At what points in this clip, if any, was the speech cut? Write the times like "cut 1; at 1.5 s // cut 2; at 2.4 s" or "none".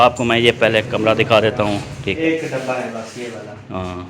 cut 1; at 2.2 s